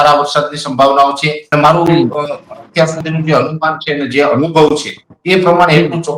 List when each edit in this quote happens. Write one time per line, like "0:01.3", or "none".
0:01.3